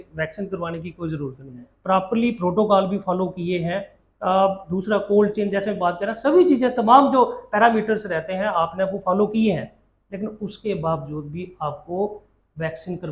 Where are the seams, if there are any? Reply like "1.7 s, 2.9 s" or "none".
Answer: 1.7 s

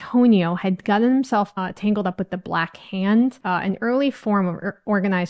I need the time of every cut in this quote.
3.4 s

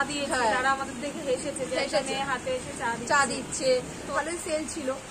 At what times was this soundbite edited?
4.1 s

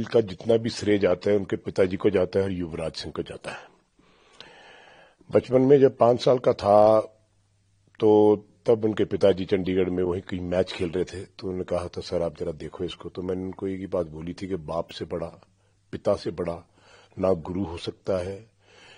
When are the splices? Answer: none

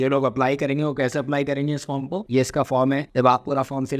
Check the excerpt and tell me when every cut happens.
2.3 s, 3.1 s

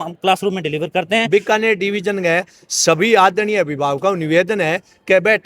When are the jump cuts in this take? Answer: 1.3 s

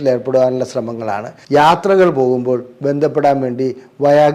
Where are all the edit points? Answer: 1.3 s

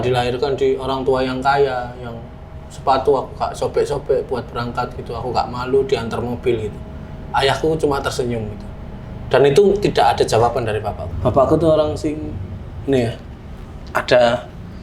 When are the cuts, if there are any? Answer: 11.0 s

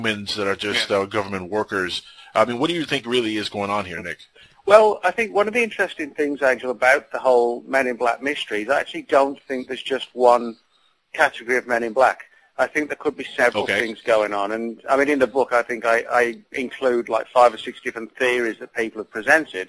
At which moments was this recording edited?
5.9 s

